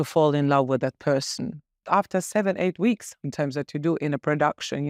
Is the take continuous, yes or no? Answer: no